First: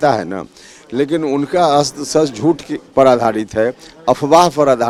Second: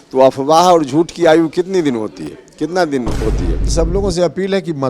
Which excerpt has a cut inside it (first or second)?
second